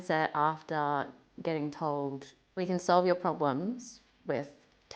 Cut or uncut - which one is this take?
uncut